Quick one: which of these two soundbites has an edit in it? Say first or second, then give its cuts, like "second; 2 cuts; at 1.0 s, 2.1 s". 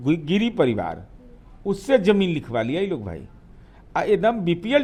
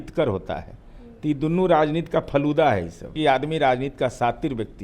second; 1 cut; at 3.2 s